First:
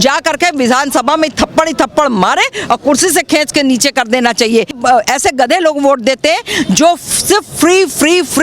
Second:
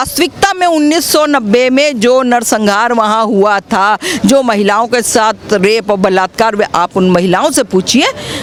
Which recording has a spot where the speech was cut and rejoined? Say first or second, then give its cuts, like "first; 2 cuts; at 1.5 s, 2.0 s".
first; 1 cut; at 4.8 s